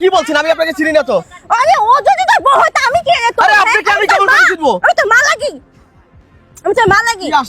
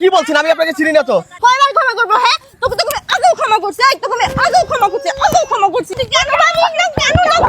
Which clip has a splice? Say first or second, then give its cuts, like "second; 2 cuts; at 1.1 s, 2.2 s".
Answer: second; 2 cuts; at 1.3 s, 6.0 s